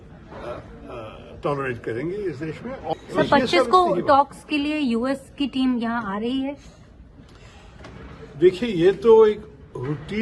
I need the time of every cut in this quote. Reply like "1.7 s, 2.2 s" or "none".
2.9 s